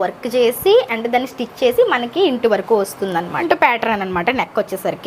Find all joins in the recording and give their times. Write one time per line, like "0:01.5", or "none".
0:03.4